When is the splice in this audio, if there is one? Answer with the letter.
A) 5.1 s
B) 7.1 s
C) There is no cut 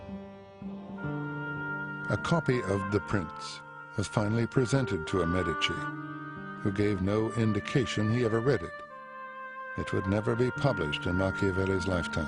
A